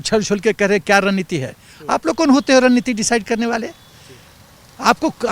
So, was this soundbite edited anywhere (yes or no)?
no